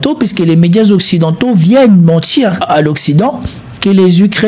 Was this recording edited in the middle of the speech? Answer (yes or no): yes